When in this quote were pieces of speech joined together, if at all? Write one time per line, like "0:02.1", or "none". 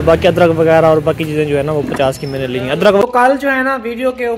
0:03.0